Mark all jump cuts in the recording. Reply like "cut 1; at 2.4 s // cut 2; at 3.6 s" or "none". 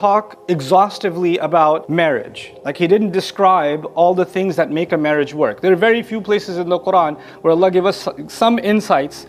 cut 1; at 1.8 s